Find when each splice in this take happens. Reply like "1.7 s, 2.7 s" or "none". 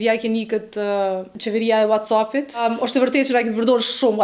1.3 s, 2.6 s